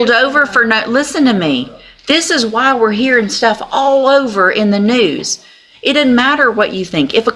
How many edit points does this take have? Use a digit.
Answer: 0